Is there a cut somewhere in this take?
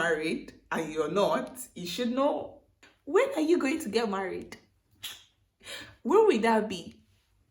no; 0 cuts

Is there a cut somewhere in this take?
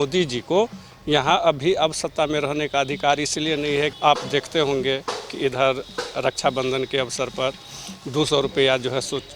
yes; 1 cut; at 3.9 s

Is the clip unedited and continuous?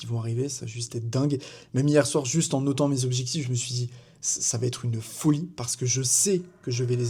yes; 0 cuts

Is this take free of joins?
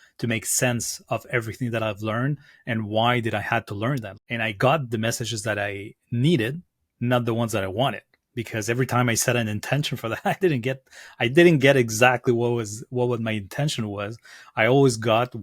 no; 1 cut; at 4.1 s

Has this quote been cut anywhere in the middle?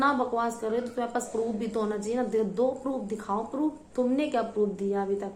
no; 0 cuts

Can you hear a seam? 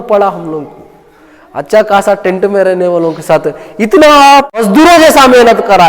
yes; 1 cut; at 4.6 s

